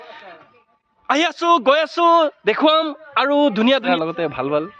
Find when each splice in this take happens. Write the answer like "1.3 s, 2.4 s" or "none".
3.9 s